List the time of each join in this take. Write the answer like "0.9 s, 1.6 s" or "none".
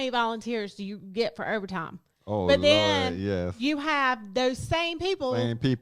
none